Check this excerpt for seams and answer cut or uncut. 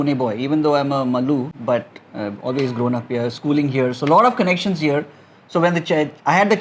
uncut